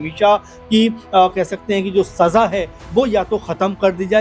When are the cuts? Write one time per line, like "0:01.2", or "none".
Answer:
none